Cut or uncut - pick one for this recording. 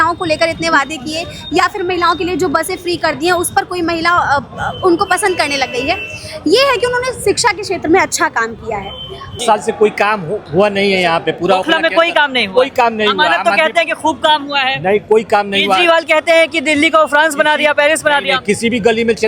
cut